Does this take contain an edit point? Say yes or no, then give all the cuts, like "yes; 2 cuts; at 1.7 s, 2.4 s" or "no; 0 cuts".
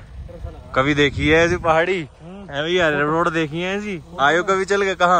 no; 0 cuts